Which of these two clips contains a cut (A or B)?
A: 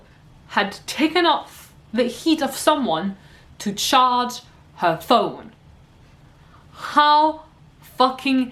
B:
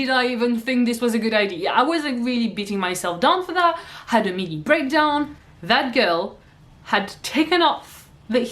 B